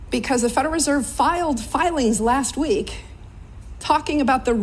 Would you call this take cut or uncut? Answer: uncut